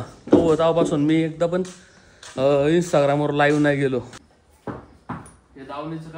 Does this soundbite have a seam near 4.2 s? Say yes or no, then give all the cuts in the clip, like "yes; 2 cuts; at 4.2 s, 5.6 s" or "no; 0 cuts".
yes; 1 cut; at 4.2 s